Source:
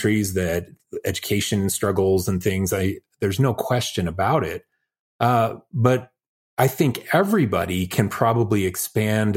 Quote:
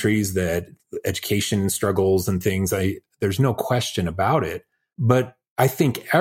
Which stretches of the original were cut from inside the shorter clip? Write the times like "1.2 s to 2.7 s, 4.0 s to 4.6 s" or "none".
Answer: 5.1 s to 6.1 s